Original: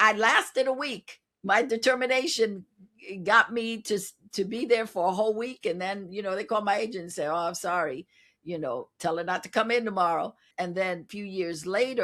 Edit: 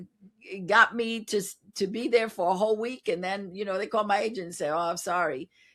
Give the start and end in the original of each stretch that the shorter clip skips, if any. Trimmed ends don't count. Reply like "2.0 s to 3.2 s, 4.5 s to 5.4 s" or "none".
none